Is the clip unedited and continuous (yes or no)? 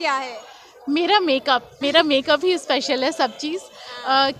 yes